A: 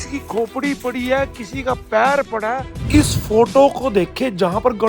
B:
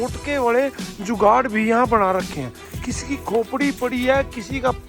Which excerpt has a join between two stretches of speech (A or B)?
A